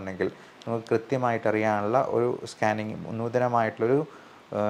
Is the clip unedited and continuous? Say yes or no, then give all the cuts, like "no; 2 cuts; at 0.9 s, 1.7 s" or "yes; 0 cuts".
yes; 0 cuts